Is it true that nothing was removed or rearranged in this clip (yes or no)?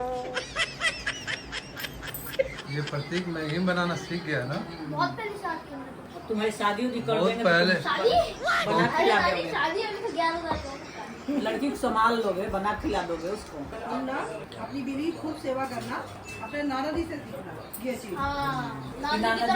no